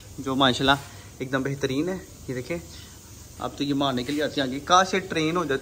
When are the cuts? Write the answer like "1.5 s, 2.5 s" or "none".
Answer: none